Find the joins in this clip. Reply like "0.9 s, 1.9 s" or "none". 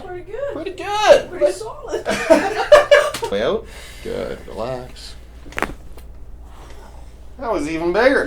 3.3 s